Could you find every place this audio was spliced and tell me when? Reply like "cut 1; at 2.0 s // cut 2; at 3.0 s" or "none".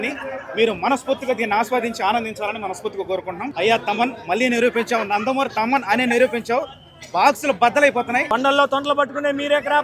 cut 1; at 3.5 s // cut 2; at 8.3 s